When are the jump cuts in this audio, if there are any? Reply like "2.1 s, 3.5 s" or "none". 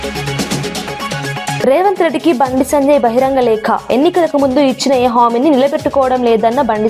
1.4 s